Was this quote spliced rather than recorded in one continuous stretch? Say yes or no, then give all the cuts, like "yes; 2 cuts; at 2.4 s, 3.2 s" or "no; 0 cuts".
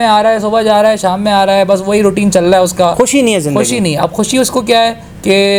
no; 0 cuts